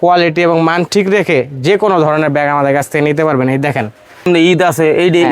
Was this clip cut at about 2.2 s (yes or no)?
no